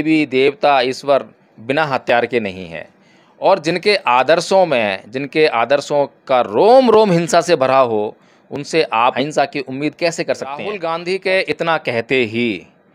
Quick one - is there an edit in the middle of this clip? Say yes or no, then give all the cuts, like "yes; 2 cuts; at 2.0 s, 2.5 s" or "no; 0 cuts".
yes; 2 cuts; at 9.1 s, 10.7 s